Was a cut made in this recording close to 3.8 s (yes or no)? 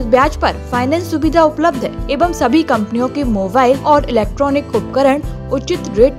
yes